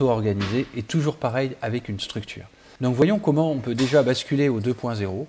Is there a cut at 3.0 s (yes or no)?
yes